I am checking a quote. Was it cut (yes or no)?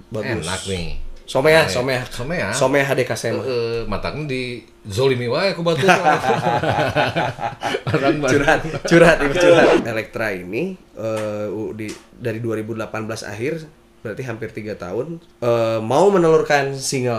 yes